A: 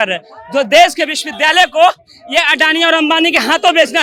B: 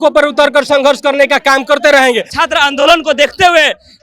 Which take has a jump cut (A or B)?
B